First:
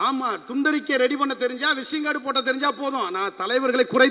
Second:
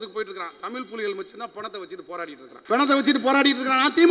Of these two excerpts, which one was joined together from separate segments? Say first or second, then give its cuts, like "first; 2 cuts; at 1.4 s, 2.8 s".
second; 1 cut; at 2.5 s